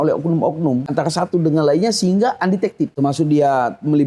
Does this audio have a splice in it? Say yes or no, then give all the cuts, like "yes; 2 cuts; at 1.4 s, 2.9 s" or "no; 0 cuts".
yes; 2 cuts; at 0.9 s, 2.9 s